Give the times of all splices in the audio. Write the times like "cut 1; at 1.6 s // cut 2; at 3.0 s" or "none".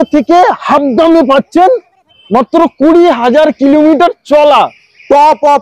none